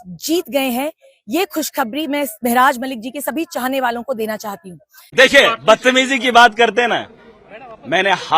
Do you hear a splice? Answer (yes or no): yes